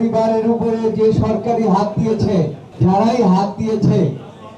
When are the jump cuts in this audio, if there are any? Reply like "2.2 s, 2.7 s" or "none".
2.6 s